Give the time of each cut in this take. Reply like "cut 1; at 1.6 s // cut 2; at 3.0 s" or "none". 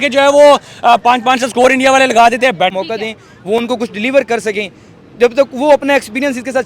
cut 1; at 2.7 s